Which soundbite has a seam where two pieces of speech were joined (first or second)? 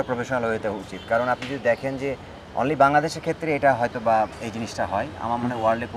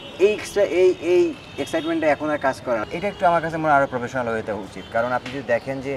second